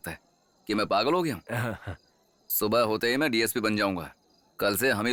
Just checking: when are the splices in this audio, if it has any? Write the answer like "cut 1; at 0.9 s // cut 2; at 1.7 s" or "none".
none